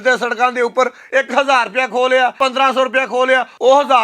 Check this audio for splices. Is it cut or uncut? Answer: cut